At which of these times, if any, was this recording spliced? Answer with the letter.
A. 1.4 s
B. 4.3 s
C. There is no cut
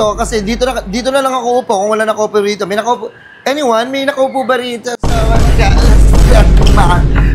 C